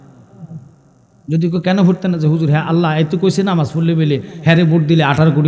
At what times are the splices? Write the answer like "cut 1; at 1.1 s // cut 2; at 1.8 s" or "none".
none